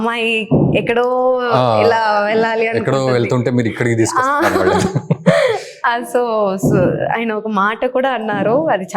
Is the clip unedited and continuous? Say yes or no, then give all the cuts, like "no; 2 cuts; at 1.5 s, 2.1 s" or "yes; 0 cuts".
yes; 0 cuts